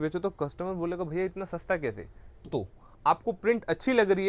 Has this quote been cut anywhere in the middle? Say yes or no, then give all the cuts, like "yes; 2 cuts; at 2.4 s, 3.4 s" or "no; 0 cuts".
yes; 1 cut; at 2.5 s